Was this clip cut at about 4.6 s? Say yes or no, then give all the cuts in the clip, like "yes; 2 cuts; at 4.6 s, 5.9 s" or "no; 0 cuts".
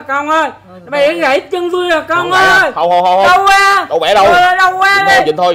no; 0 cuts